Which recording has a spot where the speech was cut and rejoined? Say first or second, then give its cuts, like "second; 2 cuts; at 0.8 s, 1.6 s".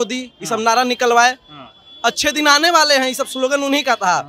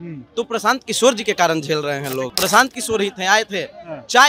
second; 1 cut; at 2.3 s